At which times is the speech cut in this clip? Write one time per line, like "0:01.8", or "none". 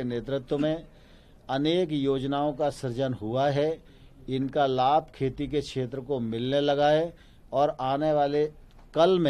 none

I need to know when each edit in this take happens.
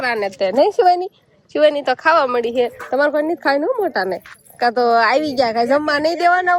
none

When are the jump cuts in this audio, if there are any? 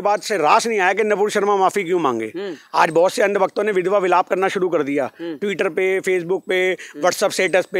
none

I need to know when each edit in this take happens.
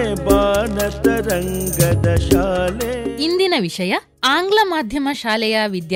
none

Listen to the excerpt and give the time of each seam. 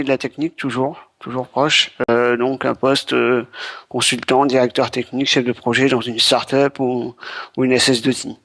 none

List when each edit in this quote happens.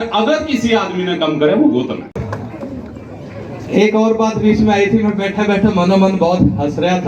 0:02.2

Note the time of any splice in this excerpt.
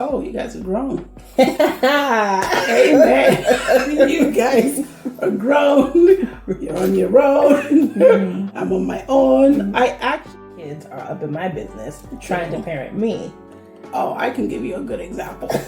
0:10.2

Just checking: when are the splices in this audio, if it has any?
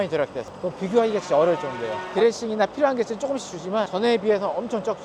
none

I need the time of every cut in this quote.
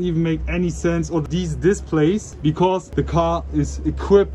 none

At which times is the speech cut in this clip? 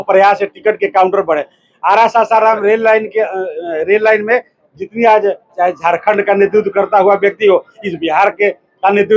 0:05.5

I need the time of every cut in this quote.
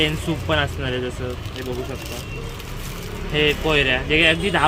none

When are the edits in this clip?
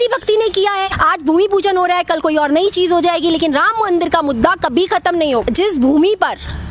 0:00.9
0:05.4

